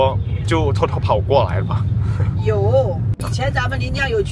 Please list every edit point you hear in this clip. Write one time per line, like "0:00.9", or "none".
0:03.2